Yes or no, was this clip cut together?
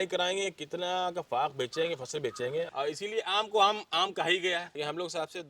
yes